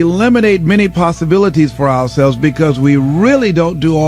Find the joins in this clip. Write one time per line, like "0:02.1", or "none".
none